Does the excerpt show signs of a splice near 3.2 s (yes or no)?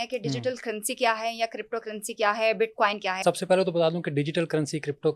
yes